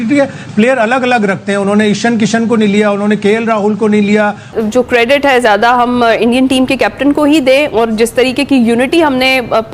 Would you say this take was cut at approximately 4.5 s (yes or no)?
yes